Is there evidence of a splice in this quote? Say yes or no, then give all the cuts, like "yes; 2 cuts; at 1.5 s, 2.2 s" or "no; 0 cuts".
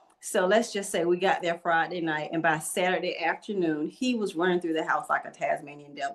no; 0 cuts